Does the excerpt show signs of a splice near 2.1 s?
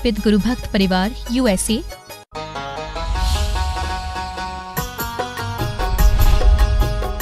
yes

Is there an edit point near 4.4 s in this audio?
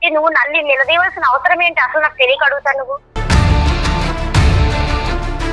no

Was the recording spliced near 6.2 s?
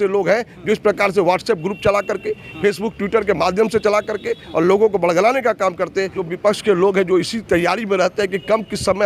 yes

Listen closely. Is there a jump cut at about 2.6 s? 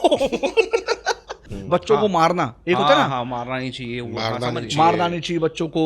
no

